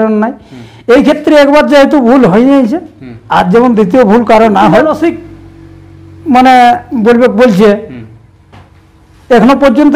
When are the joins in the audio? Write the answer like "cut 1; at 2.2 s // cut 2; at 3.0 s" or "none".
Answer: cut 1; at 5.0 s